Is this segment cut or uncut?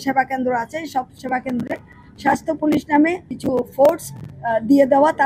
uncut